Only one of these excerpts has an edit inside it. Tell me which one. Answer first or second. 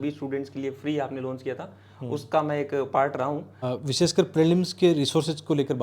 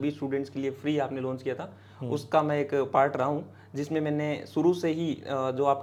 first